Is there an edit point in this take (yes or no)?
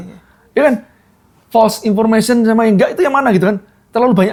no